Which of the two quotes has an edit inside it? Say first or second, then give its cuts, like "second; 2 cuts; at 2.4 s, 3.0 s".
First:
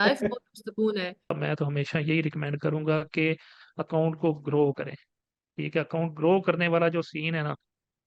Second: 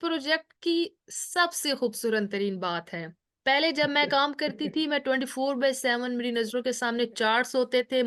first; 1 cut; at 1.3 s